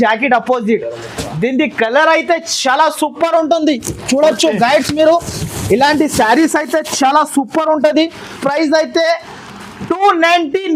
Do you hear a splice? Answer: yes; 1 cut; at 8.4 s

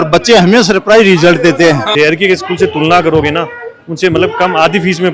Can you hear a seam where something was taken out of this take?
yes; 1 cut; at 1.9 s

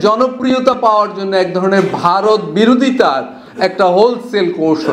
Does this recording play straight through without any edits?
yes; 0 cuts

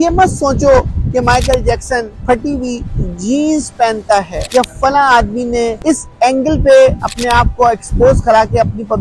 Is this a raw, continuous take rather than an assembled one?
no; 3 cuts; at 2.2 s, 4.4 s, 5.8 s

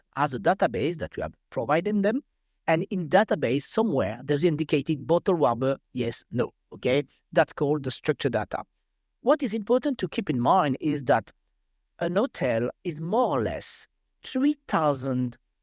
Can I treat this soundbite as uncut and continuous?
yes; 0 cuts

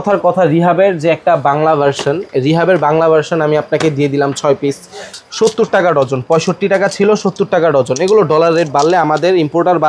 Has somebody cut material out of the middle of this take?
yes; 1 cut; at 5.1 s

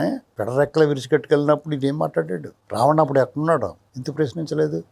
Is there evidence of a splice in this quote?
no; 0 cuts

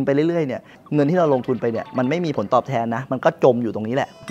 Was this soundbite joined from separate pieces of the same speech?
no; 0 cuts

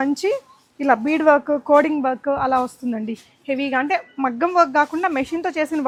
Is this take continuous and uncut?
yes; 0 cuts

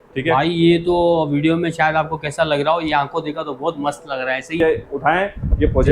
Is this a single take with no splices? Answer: no; 1 cut; at 4.6 s

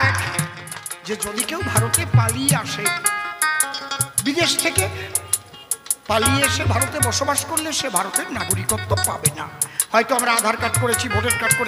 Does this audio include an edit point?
yes; 1 cut; at 1.0 s

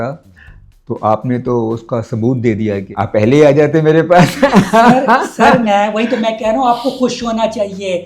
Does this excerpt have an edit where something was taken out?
yes; 1 cut; at 2.9 s

